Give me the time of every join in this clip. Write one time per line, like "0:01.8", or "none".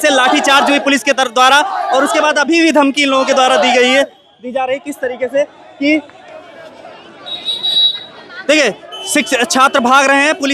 none